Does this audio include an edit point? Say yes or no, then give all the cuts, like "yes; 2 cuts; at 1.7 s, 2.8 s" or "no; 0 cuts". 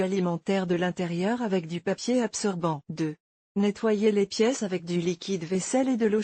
yes; 1 cut; at 2.8 s